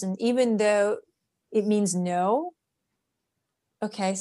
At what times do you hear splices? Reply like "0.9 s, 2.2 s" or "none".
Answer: none